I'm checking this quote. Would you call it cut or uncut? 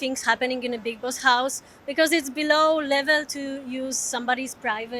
uncut